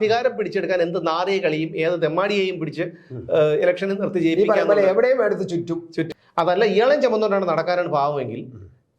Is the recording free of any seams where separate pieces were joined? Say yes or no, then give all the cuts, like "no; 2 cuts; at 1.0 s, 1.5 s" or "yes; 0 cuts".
no; 1 cut; at 6.0 s